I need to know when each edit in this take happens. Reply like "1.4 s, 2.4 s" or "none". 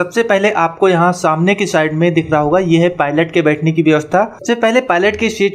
4.4 s